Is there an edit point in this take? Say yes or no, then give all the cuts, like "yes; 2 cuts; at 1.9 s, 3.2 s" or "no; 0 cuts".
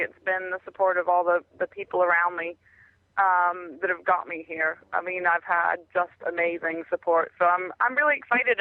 no; 0 cuts